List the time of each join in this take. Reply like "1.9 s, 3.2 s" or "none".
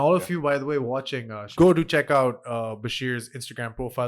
1.5 s